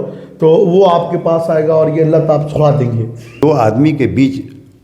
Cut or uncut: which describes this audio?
cut